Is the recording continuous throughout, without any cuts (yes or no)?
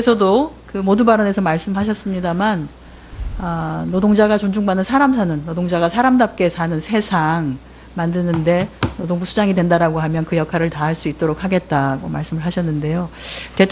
no